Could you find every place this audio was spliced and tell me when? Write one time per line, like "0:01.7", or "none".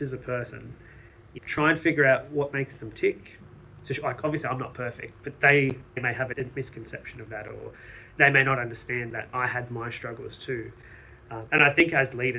0:03.3